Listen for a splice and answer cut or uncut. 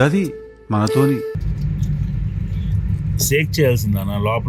cut